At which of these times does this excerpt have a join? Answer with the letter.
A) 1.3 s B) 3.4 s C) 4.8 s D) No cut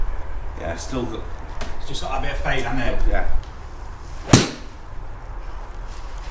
B